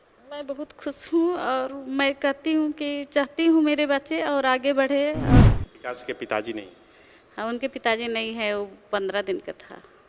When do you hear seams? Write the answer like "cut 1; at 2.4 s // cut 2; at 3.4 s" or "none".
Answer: cut 1; at 5.4 s